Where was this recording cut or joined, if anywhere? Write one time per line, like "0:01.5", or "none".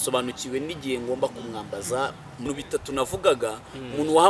0:02.4